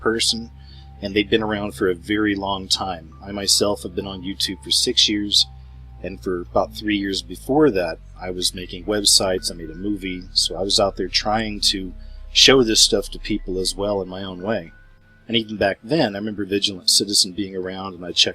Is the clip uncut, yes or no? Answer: no